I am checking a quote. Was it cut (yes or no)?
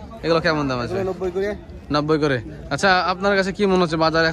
no